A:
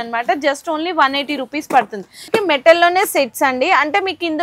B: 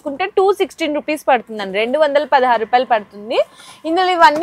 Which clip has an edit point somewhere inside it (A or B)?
A